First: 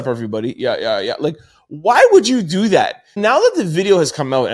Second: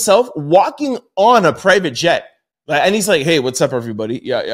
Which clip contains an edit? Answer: first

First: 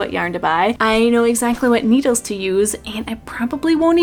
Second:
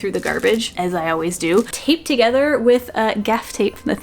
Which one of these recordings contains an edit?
second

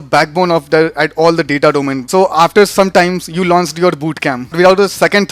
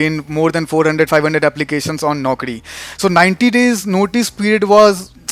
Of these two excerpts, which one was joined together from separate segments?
first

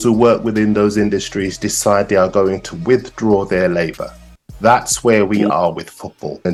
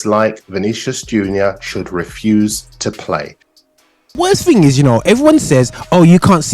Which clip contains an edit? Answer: second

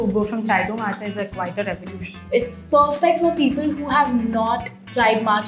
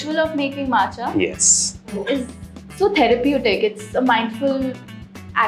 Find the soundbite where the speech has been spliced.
first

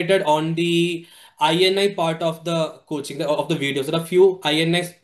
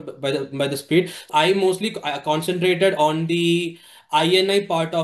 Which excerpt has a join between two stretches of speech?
second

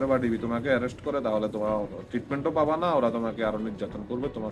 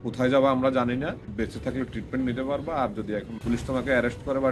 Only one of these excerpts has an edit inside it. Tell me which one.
second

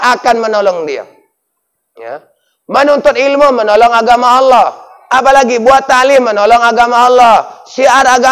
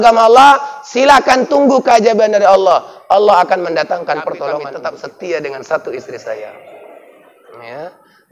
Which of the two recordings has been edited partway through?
second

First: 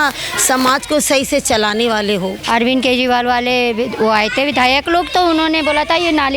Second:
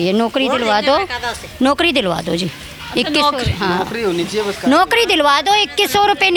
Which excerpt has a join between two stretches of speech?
first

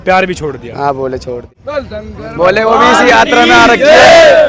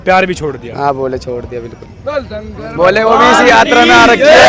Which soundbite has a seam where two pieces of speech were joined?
first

